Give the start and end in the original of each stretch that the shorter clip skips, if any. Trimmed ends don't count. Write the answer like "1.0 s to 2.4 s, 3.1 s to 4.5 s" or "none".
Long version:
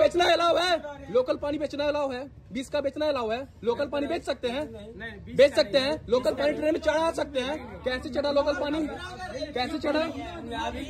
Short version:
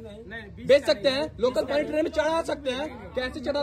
none